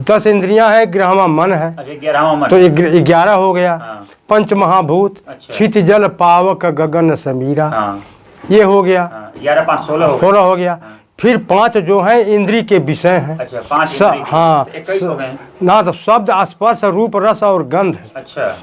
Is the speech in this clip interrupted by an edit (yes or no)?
no